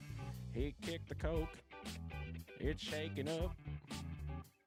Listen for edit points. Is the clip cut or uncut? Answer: uncut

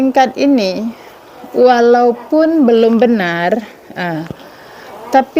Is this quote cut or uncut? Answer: uncut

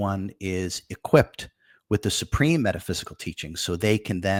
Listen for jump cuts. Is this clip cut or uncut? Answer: uncut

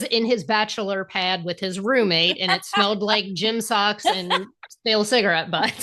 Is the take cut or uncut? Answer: uncut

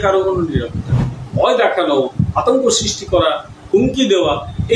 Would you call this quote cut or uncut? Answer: cut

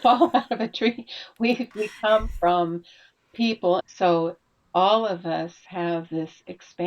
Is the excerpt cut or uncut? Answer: cut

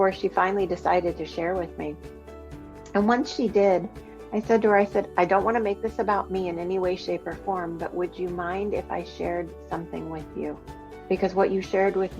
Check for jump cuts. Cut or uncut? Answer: cut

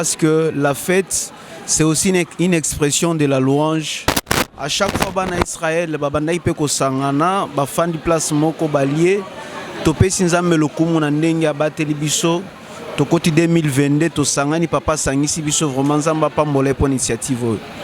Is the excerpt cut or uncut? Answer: uncut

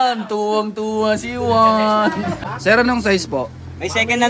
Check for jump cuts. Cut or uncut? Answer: cut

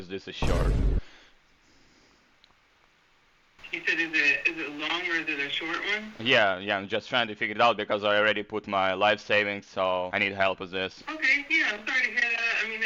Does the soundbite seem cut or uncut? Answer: uncut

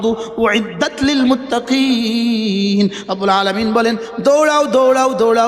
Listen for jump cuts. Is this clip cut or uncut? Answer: uncut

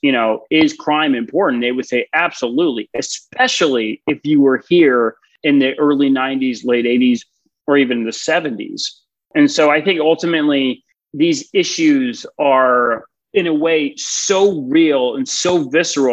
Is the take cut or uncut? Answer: cut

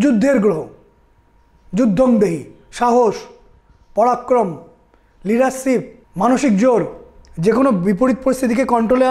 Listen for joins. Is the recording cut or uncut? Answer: uncut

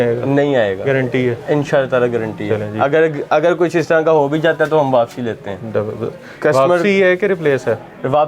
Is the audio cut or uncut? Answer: uncut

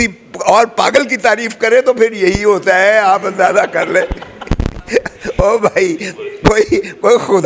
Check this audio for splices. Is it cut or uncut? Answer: uncut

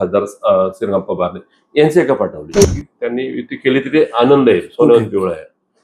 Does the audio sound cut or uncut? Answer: cut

